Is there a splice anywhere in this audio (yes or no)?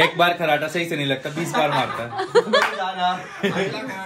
no